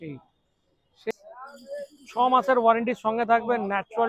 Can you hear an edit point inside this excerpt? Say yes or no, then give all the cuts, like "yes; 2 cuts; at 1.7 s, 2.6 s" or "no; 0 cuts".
yes; 1 cut; at 1.1 s